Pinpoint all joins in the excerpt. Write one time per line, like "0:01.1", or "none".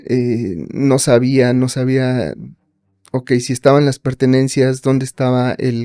none

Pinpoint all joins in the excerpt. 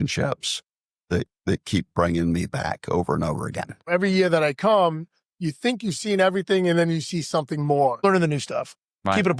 0:03.9
0:08.0

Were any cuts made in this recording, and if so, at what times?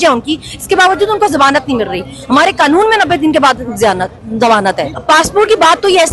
0:04.9

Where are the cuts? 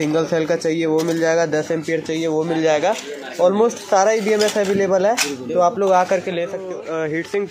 0:06.6

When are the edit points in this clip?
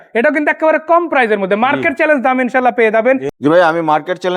0:03.3

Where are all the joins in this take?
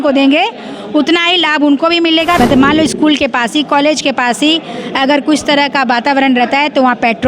0:02.4

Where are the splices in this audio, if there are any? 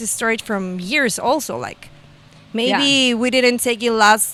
none

